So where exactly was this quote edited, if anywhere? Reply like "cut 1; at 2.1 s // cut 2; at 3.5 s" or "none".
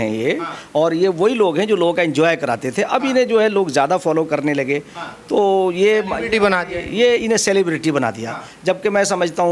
none